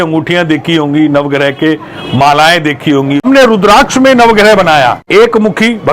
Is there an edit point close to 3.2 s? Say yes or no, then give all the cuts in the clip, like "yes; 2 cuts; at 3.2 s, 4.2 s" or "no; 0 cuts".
yes; 2 cuts; at 3.2 s, 5.0 s